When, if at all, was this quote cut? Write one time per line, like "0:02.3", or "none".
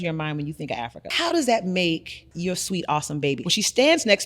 0:01.1
0:02.3
0:03.4